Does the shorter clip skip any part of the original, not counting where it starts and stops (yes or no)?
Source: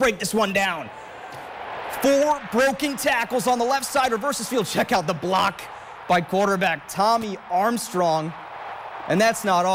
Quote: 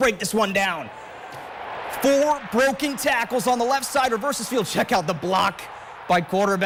no